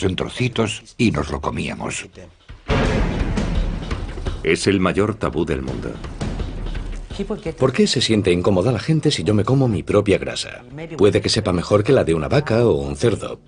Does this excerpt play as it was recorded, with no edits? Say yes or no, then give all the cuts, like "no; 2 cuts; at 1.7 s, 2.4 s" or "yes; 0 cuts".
yes; 0 cuts